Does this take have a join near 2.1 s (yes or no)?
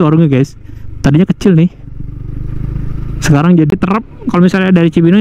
no